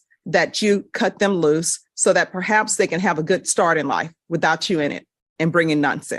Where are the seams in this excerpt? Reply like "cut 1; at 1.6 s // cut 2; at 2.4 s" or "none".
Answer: none

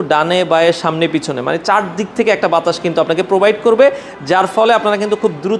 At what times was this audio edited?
none

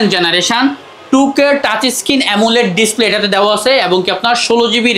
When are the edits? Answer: none

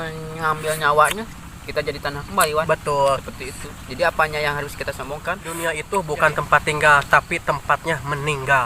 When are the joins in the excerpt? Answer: cut 1; at 5.5 s

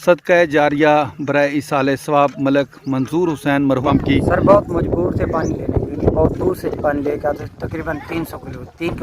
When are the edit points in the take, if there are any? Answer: cut 1; at 3.8 s

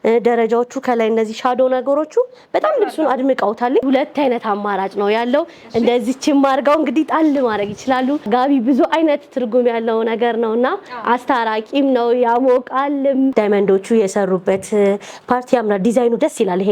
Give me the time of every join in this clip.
cut 1; at 3.8 s // cut 2; at 8.3 s // cut 3; at 13.3 s

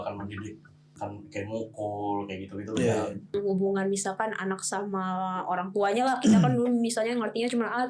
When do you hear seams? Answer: cut 1; at 0.9 s // cut 2; at 3.3 s

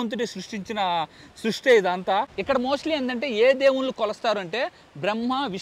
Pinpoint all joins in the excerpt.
cut 1; at 2.3 s

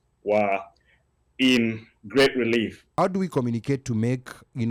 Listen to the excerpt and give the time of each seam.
cut 1; at 2.9 s

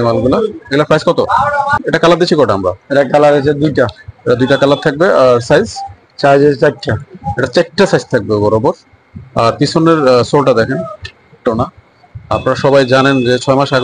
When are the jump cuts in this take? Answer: cut 1; at 1.8 s // cut 2; at 11.5 s

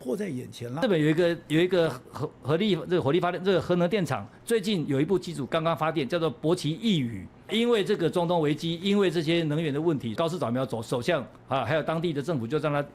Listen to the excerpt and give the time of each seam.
cut 1; at 0.8 s // cut 2; at 7.5 s // cut 3; at 10.1 s

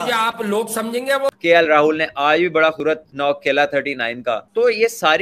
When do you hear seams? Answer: cut 1; at 1.3 s // cut 2; at 2.9 s

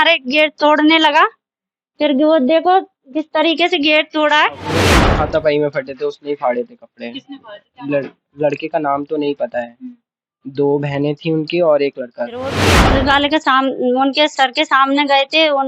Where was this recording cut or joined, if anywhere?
cut 1; at 5.1 s // cut 2; at 12.7 s

